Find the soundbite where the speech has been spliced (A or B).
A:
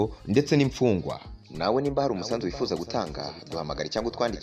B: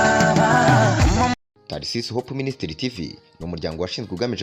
B